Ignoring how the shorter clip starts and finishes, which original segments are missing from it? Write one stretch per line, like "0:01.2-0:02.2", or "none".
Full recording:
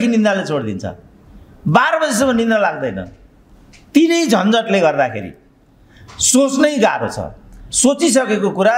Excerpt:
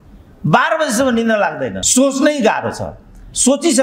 0:03.0-0:06.2